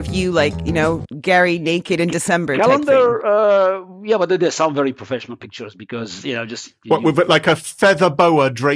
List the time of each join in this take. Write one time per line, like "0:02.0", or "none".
0:06.8